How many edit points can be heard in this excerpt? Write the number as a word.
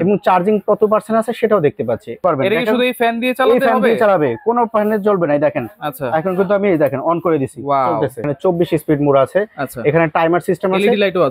two